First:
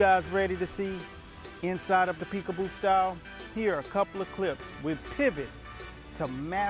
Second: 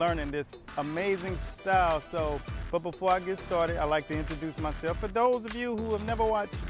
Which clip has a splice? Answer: second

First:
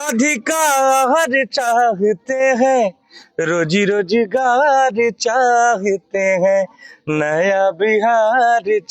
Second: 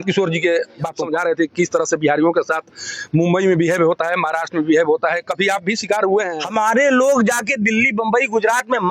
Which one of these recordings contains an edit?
second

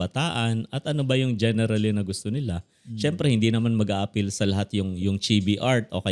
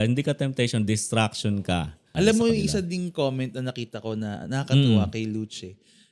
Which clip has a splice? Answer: second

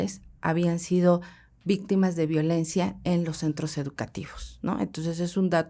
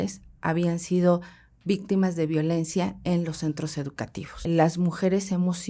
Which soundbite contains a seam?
second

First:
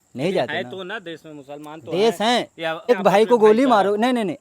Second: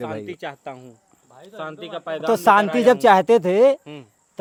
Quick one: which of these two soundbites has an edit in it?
first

